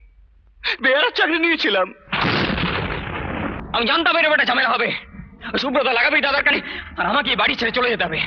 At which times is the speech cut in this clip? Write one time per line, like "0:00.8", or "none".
0:03.6